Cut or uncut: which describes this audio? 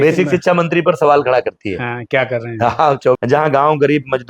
cut